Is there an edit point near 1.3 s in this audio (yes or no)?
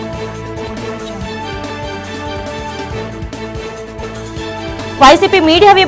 yes